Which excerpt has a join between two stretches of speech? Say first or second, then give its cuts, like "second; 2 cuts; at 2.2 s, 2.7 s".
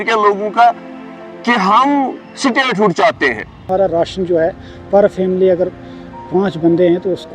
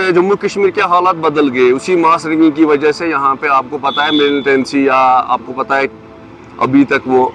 first; 1 cut; at 3.6 s